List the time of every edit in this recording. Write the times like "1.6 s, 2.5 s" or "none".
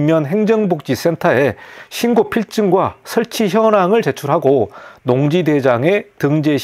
none